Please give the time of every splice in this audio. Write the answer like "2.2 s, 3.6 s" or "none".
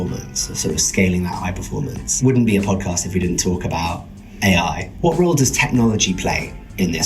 2.0 s, 4.9 s

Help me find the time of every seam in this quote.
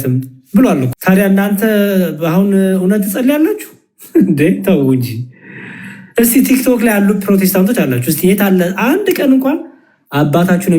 none

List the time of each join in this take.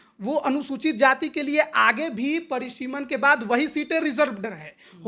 none

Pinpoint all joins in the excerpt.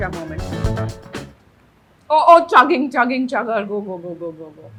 none

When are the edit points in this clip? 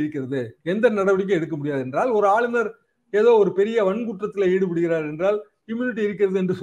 none

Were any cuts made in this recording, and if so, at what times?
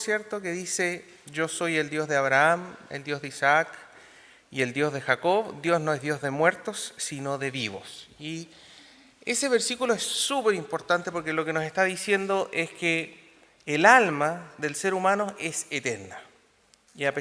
2.5 s

